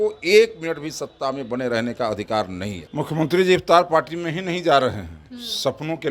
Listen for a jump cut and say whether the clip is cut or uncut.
cut